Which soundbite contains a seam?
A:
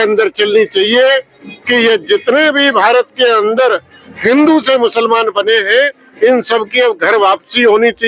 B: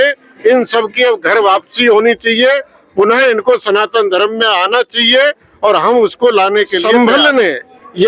B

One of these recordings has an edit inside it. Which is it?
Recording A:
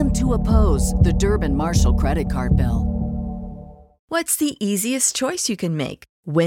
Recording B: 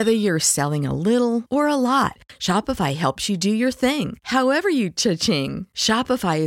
A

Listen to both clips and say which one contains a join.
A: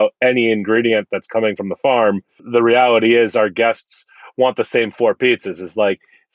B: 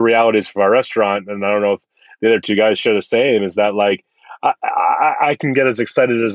A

